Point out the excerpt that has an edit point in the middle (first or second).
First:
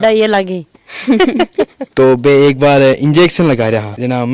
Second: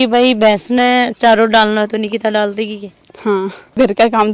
first